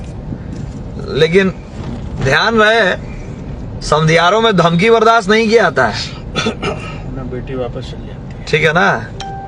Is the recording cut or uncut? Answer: uncut